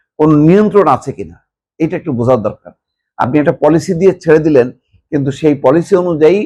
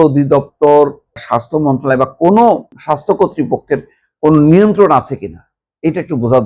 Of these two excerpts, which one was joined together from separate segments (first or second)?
second